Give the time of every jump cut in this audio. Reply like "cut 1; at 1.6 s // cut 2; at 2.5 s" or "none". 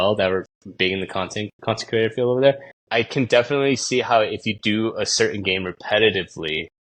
cut 1; at 2.7 s